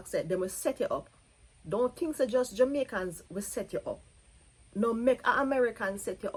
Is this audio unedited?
yes; 0 cuts

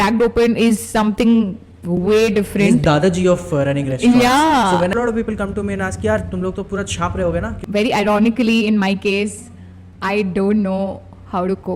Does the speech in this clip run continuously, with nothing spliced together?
no; 2 cuts; at 4.9 s, 7.6 s

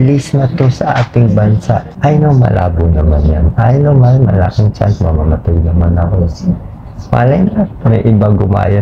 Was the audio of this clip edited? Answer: yes; 1 cut; at 1.9 s

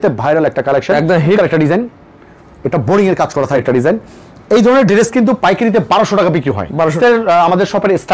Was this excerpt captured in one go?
no; 3 cuts; at 1.4 s, 3.6 s, 6.9 s

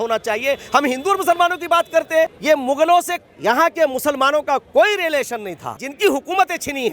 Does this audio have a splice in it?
yes; 2 cuts; at 2.4 s, 5.9 s

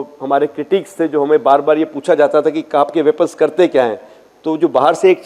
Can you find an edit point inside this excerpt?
no; 0 cuts

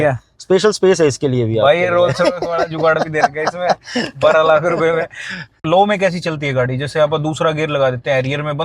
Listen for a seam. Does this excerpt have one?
yes; 1 cut; at 5.6 s

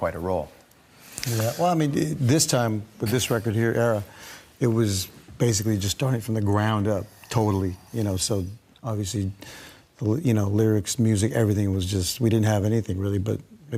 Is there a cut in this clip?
no; 0 cuts

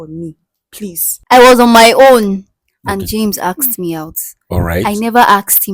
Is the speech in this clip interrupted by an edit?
yes; 1 cut; at 1.1 s

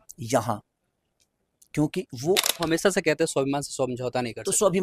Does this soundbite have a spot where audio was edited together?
yes; 1 cut; at 2.5 s

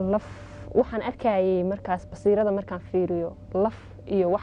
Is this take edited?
no; 0 cuts

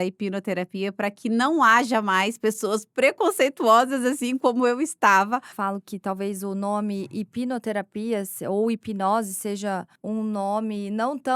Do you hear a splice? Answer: yes; 2 cuts; at 5.5 s, 9.9 s

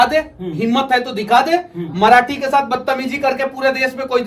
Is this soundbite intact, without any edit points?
yes; 0 cuts

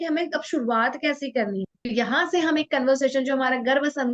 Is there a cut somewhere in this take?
yes; 1 cut; at 1.8 s

